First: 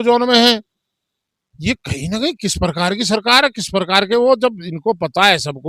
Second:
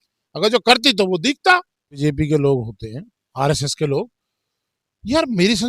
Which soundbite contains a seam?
second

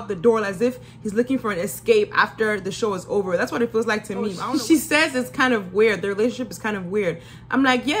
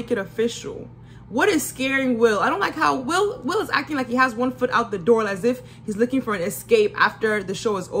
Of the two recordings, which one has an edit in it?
first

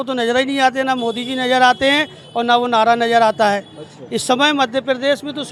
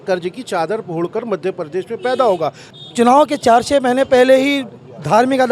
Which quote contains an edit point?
second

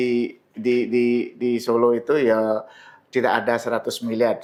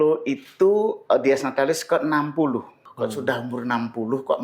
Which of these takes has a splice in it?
second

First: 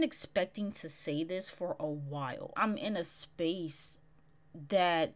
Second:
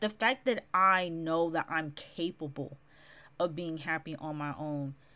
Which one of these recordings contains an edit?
first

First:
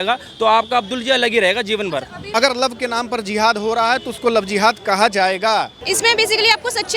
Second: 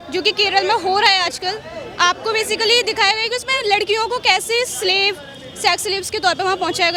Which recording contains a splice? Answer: first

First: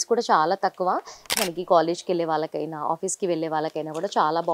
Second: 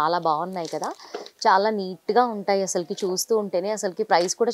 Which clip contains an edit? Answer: first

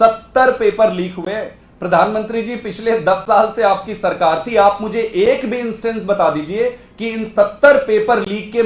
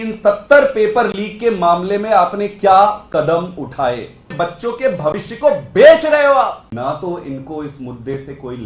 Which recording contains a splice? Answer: second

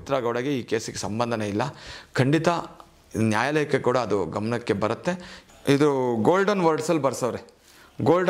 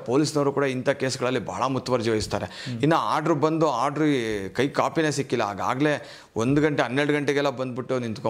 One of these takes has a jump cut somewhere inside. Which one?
first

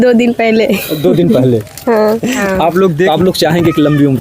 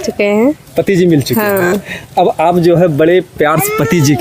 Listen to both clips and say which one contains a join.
first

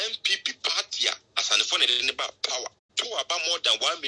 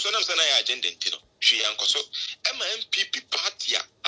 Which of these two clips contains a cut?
first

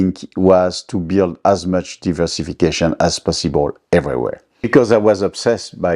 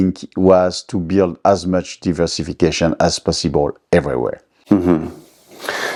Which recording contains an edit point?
first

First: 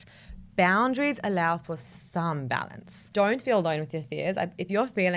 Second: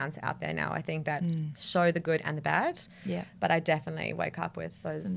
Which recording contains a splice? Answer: first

